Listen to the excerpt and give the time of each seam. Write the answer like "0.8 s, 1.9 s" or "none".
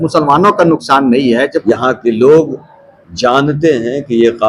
1.6 s